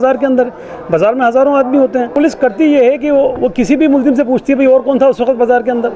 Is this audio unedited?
no; 1 cut; at 2.1 s

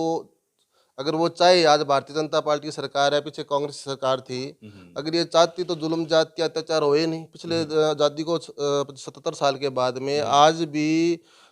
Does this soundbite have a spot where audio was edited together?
no; 0 cuts

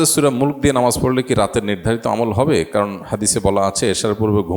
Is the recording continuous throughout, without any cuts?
yes; 0 cuts

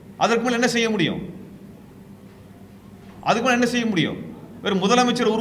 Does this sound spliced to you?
no; 0 cuts

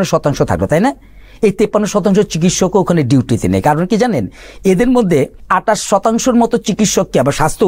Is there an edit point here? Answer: yes; 1 cut; at 5.4 s

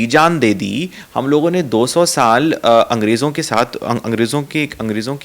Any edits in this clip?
no; 0 cuts

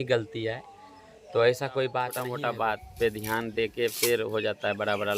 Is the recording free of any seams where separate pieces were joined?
no; 1 cut; at 2.2 s

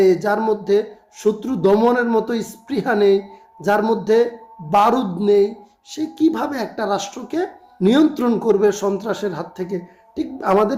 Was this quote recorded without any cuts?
yes; 0 cuts

